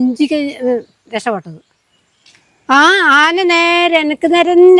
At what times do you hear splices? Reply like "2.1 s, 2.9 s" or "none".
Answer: none